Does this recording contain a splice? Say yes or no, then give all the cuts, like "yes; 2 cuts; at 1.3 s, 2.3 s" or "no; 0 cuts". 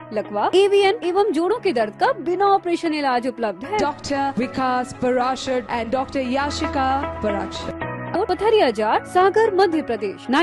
yes; 1 cut; at 8.1 s